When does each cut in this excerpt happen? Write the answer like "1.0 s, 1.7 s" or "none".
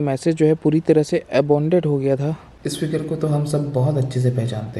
2.5 s